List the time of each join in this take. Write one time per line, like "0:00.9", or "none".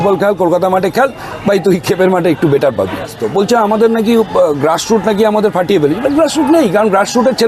0:03.2